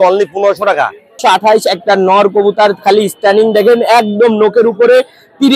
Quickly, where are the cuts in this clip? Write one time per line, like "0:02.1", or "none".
0:01.1